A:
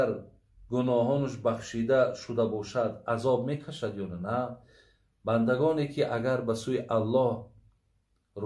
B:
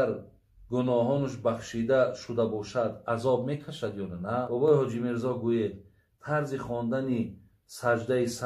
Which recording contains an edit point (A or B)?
B